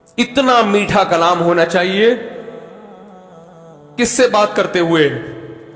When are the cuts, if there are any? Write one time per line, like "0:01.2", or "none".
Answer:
none